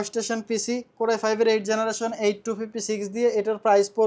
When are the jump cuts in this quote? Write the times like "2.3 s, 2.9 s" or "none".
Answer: none